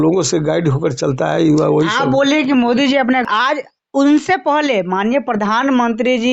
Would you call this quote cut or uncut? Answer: cut